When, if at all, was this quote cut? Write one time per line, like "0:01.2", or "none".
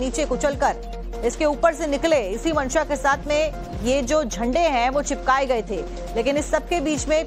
0:05.0